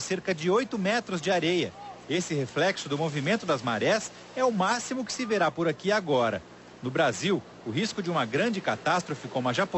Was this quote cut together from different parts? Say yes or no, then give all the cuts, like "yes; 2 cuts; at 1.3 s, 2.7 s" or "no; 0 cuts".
yes; 1 cut; at 5.4 s